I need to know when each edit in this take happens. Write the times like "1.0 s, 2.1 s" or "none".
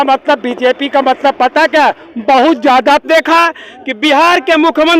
3.1 s

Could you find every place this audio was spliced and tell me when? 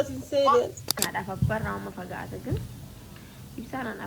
1.1 s

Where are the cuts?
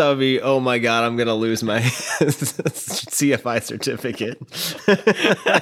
none

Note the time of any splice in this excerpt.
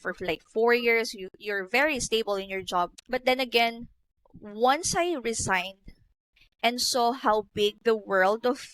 3.0 s

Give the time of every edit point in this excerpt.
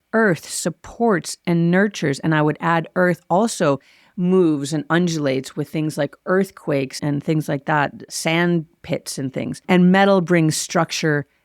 7.0 s, 8.0 s, 9.6 s

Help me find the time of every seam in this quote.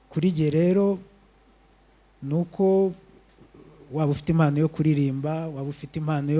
none

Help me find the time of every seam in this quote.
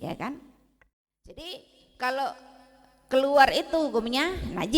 1.4 s

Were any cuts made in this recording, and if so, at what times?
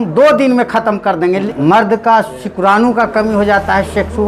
1.4 s

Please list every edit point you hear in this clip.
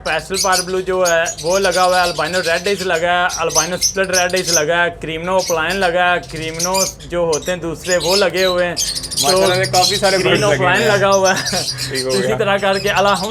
none

